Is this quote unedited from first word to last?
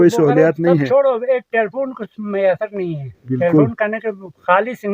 yes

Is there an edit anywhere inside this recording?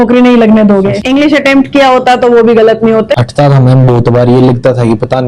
yes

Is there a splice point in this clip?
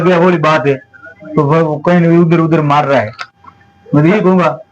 no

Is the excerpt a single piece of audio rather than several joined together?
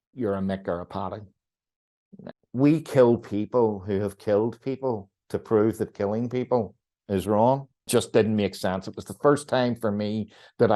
no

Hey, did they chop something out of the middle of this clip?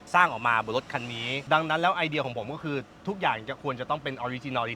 yes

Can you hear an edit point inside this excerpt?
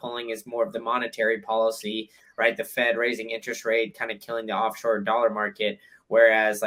no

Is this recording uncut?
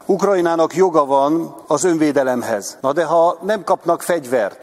no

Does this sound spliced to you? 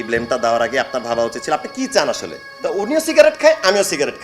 yes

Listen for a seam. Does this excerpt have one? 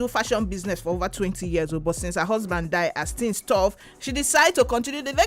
no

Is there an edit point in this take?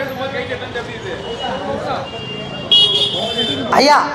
no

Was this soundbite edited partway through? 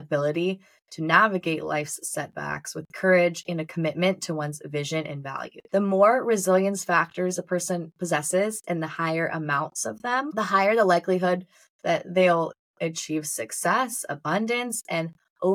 yes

